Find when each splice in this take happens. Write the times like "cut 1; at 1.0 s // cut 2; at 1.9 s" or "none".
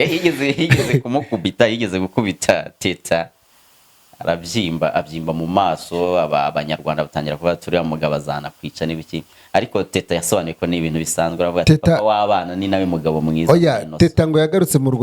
none